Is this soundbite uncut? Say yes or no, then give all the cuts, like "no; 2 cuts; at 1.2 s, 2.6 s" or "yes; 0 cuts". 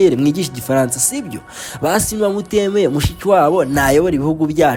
yes; 0 cuts